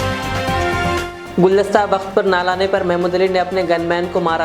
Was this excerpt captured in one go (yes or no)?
no